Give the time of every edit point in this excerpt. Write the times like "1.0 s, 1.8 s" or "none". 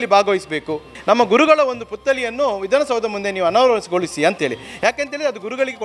0.9 s

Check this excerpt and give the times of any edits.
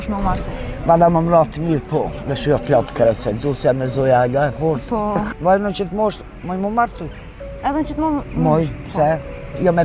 5.3 s

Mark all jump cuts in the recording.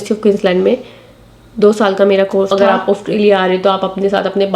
2.5 s

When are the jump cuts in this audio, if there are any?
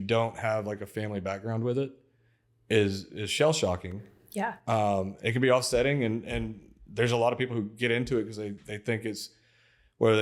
5.1 s

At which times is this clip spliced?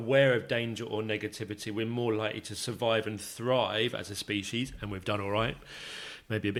none

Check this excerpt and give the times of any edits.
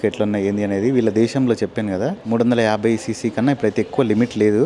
2.2 s

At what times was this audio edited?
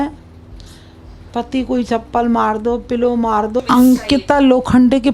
3.6 s

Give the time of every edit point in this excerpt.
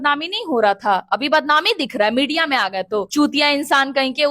3.1 s

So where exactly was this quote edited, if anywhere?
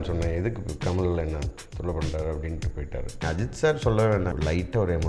3.1 s, 4.3 s

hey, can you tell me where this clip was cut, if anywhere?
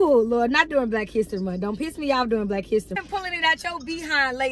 3.0 s

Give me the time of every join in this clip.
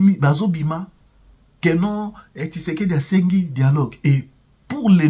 none

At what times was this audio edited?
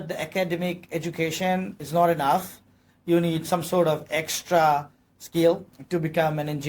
1.8 s, 5.7 s

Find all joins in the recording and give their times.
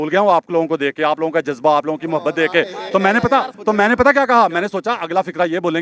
none

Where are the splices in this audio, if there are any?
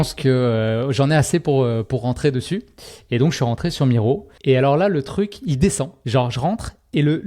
4.3 s, 5.9 s

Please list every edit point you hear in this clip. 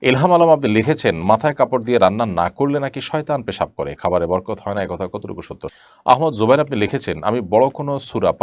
5.7 s

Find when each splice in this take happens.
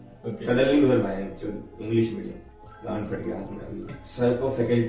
2.5 s, 4.0 s

